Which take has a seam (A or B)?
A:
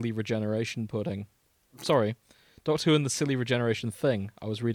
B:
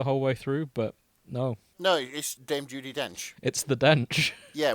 B